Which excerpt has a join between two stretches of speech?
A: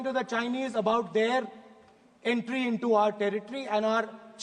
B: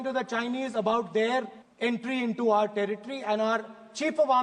B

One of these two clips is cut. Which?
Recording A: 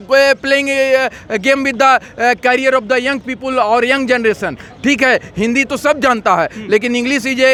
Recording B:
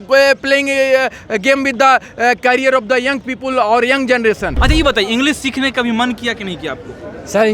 B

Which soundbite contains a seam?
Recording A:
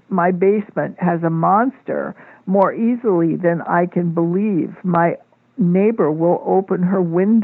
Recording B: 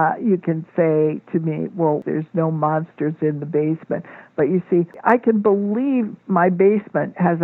B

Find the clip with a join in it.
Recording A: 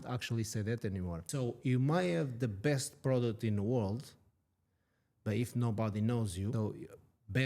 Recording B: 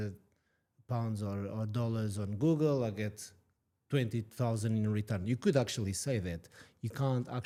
A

